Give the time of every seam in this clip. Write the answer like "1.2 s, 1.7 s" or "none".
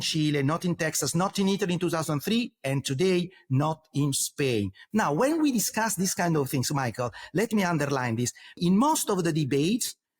4.8 s, 8.6 s